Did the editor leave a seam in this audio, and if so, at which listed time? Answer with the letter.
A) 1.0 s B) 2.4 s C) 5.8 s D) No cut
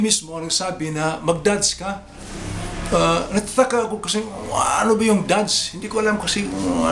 D